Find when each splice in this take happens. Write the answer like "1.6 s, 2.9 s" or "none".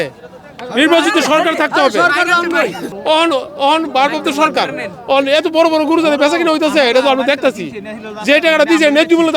2.9 s